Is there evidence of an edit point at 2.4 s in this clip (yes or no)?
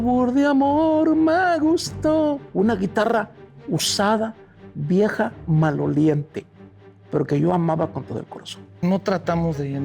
yes